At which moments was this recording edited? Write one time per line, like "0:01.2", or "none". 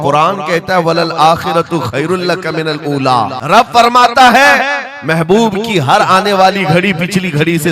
0:03.4